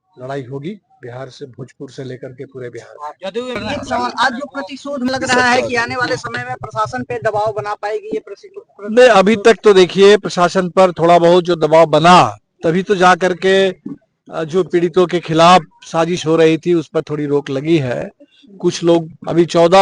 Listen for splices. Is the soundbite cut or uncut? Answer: cut